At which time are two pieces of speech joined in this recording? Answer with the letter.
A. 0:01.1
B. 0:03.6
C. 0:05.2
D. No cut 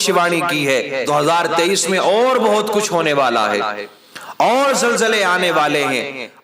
A